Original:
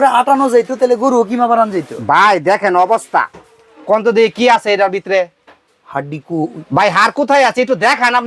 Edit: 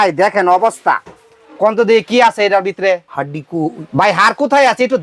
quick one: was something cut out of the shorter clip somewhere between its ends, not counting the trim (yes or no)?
yes